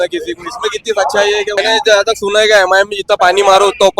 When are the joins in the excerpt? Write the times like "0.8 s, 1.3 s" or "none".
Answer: 1.6 s